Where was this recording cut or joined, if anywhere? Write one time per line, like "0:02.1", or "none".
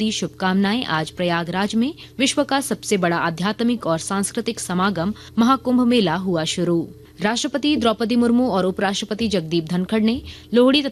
0:02.0
0:05.2

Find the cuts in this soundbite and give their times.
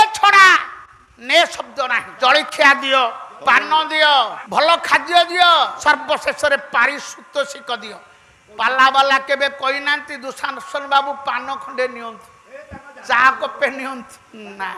0:02.1
0:03.3
0:04.4
0:05.8

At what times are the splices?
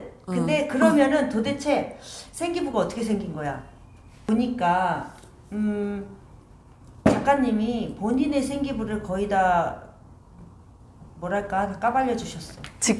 0:04.2

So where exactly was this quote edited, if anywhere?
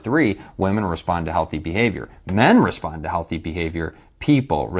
0:03.3

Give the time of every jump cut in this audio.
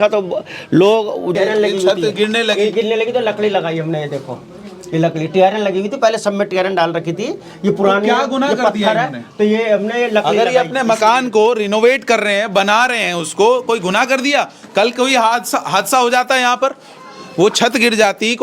0:01.3

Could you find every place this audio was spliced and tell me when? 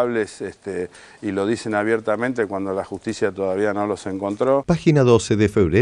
0:04.6

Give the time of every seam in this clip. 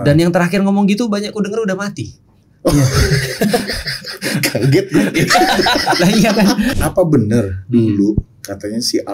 0:06.7

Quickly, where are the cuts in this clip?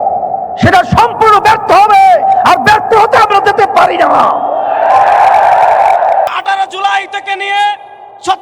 0:06.3

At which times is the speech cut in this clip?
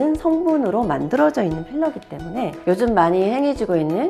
0:02.5

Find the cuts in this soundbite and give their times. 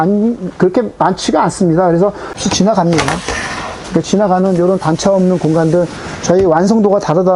0:02.4

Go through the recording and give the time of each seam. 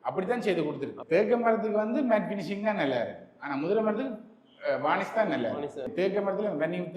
0:00.9
0:05.9

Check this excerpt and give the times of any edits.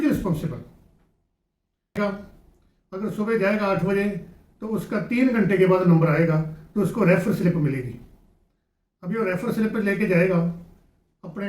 0:02.0

